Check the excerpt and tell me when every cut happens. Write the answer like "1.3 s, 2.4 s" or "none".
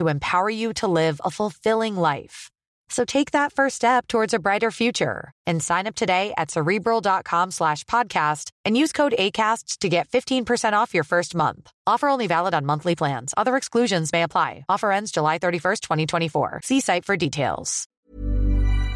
18.0 s

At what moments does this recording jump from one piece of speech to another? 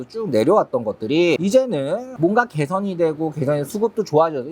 2.1 s

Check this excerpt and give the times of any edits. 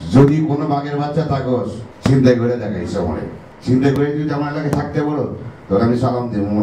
1.8 s

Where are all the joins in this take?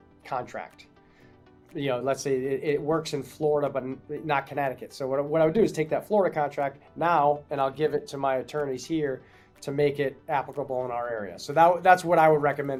none

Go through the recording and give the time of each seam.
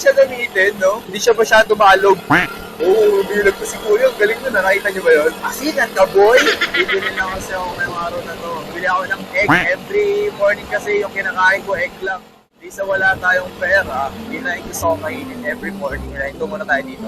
none

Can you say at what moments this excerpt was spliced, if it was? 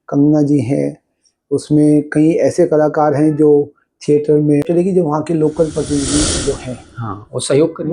4.6 s

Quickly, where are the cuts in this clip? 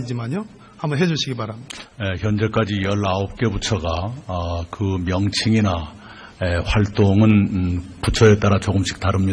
5.0 s

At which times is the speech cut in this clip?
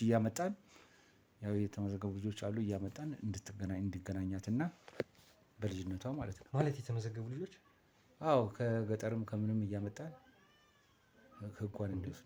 none

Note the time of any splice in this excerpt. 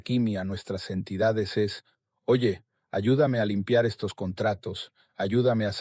none

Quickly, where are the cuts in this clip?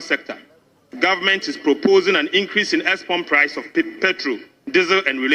none

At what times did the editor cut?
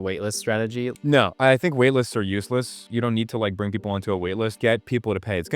0.9 s, 2.8 s, 4.6 s

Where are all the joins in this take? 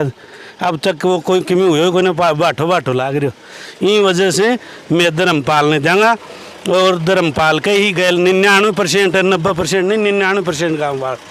none

